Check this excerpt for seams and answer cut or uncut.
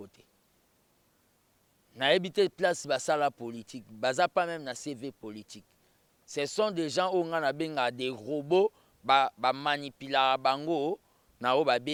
uncut